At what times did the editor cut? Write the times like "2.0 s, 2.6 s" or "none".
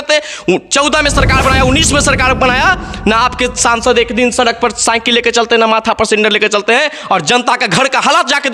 none